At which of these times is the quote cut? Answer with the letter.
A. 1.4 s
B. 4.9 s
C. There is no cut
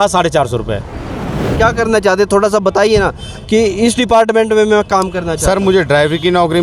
A